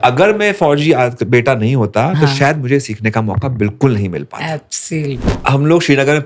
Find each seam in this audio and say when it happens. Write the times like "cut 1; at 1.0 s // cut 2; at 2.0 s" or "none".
cut 1; at 5.3 s